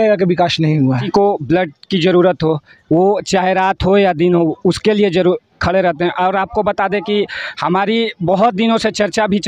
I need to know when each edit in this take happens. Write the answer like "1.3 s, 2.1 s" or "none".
1.0 s